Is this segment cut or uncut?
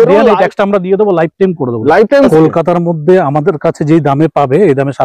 cut